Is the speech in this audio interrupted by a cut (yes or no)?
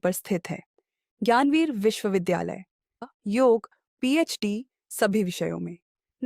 yes